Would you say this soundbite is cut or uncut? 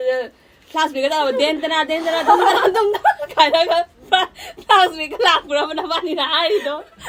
uncut